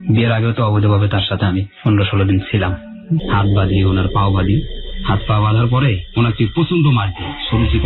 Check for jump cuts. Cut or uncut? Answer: cut